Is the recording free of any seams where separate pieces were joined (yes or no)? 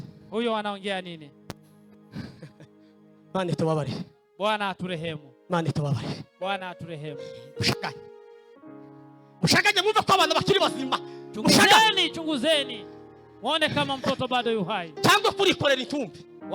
yes